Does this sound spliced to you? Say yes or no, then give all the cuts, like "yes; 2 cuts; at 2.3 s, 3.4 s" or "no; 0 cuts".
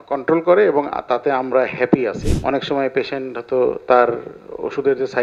yes; 1 cut; at 2.3 s